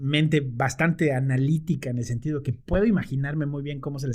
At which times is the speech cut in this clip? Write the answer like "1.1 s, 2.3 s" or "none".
none